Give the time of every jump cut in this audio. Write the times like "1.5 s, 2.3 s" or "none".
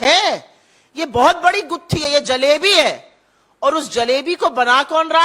none